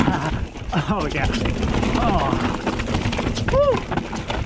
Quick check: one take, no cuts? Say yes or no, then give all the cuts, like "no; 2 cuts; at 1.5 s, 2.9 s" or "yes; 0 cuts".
yes; 0 cuts